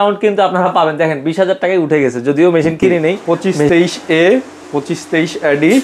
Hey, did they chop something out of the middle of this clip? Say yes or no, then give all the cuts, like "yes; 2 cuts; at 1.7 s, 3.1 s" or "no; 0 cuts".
yes; 1 cut; at 3.2 s